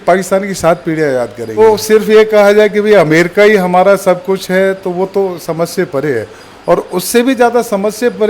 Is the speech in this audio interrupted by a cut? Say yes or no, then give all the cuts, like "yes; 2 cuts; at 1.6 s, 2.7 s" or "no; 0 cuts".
yes; 1 cut; at 1.6 s